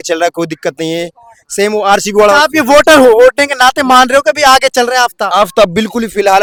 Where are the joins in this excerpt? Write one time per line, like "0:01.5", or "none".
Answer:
none

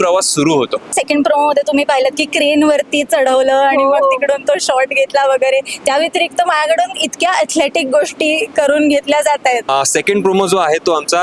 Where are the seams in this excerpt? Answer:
0:01.0
0:09.7

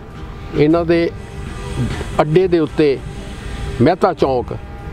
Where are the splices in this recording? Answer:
none

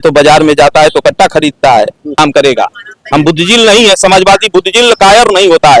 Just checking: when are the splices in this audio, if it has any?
0:02.2

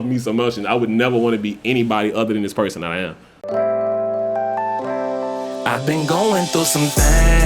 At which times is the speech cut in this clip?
0:03.5

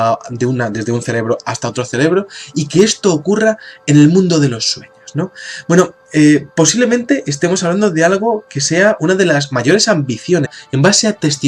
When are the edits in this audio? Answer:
none

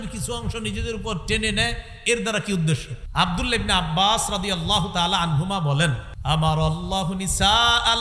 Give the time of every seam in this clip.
0:03.0
0:06.1

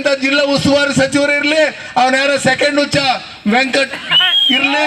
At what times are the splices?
none

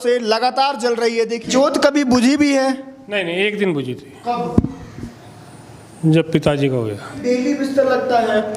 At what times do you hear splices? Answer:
0:01.5
0:07.1

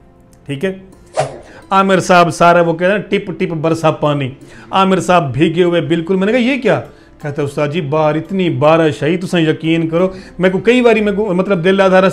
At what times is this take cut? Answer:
0:01.3

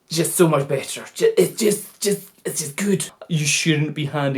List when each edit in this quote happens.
0:03.2

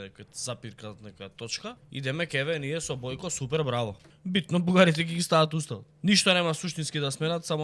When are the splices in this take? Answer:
0:01.8
0:04.1
0:05.8

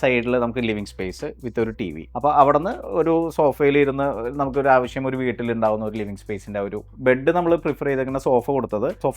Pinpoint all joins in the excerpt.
0:06.8

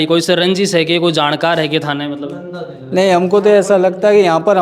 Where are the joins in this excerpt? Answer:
none

